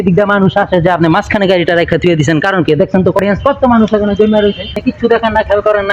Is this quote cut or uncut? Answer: cut